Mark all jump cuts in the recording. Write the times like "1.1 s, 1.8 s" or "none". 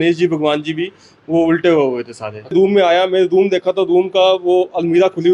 2.5 s